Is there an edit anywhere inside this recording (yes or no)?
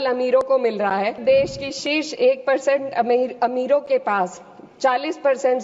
yes